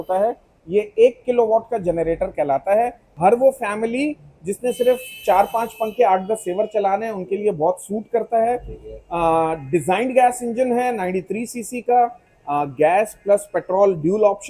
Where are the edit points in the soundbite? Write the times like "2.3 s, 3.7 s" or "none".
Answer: 3.0 s